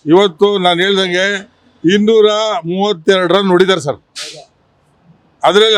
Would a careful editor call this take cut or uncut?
uncut